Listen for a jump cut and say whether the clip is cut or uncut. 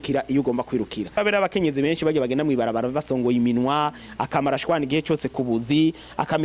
cut